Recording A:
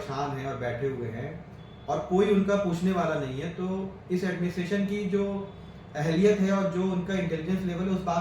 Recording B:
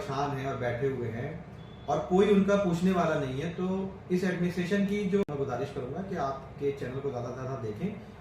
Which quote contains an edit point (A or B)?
B